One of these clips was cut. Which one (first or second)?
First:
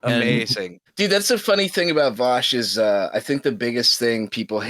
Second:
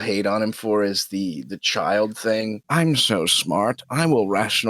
second